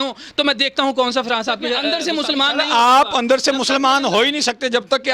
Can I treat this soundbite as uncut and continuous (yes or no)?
no